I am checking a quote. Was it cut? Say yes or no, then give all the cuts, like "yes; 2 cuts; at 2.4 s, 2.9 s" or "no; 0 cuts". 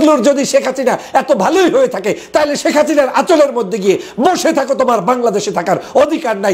no; 0 cuts